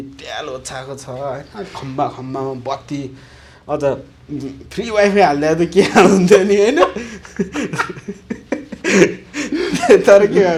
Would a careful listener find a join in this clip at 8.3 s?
no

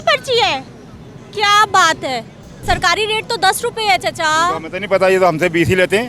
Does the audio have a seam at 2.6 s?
yes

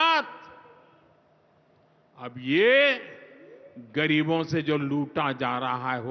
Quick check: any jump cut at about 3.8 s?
no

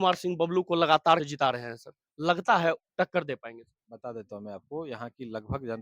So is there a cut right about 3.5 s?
no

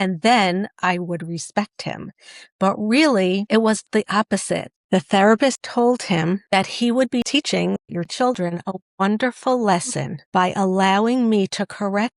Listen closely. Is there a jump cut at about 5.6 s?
yes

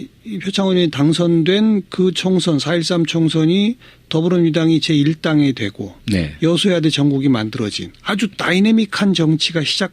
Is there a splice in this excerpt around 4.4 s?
yes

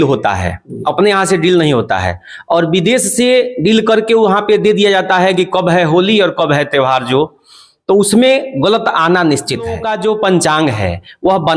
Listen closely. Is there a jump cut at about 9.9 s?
yes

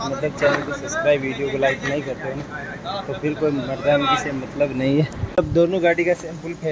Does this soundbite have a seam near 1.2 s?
no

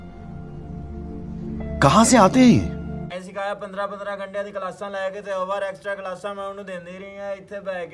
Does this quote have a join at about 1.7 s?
no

